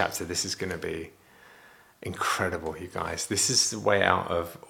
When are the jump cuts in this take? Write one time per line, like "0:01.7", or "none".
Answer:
none